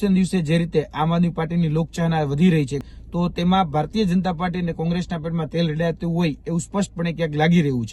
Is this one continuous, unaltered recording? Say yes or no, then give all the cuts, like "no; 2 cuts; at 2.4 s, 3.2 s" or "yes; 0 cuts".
no; 1 cut; at 2.8 s